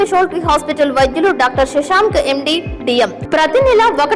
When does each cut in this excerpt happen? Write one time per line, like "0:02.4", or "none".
0:03.2